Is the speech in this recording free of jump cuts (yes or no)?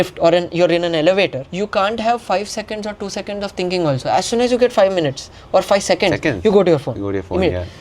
no